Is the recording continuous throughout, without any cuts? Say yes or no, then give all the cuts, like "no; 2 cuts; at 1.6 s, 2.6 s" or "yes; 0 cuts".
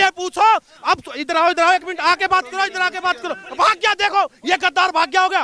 yes; 0 cuts